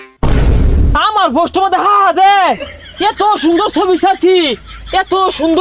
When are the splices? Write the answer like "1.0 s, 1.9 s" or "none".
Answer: 0.9 s